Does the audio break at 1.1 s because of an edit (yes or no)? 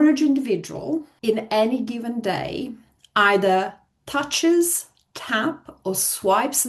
yes